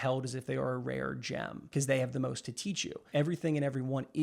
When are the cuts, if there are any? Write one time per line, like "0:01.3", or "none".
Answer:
0:01.6
0:03.1

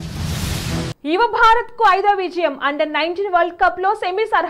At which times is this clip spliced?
0:00.9

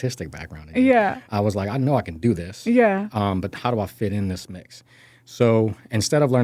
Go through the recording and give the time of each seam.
0:01.2

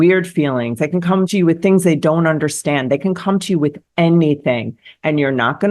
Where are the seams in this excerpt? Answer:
0:01.3

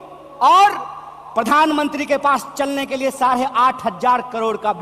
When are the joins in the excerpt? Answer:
none

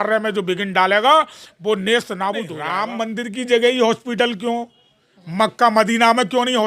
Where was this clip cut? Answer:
0:02.6

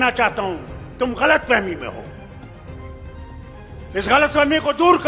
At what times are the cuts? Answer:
0:02.0
0:03.5

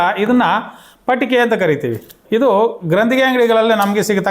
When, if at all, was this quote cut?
0:02.2

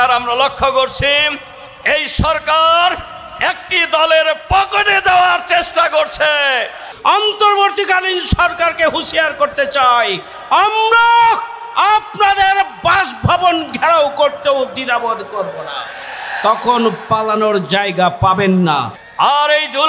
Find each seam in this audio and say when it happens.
0:06.8
0:19.0

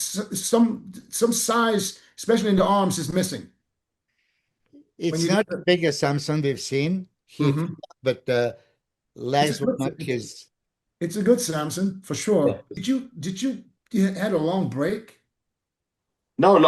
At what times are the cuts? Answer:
0:12.8

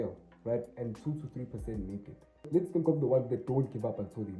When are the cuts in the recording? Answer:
0:02.4

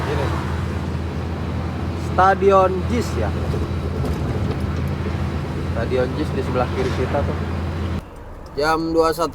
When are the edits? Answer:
0:08.0

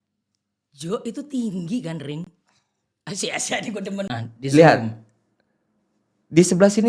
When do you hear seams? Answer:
0:04.1

